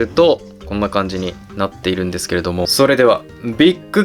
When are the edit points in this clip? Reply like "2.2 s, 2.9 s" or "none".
2.7 s